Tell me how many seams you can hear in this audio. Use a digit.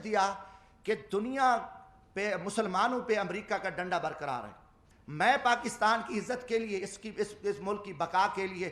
1